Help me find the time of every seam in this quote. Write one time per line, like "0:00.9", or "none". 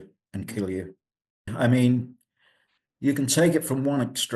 0:01.5